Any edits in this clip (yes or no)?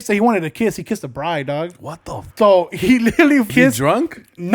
yes